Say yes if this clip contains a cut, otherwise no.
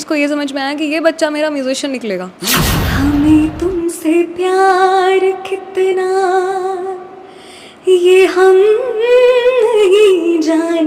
yes